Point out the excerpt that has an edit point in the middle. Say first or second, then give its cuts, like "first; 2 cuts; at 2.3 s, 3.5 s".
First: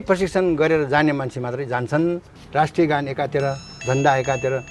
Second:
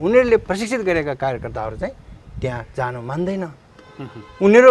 first; 1 cut; at 2.4 s